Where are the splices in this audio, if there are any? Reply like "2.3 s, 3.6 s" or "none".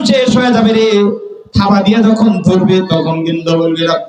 none